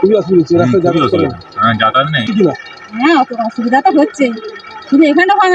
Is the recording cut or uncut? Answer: uncut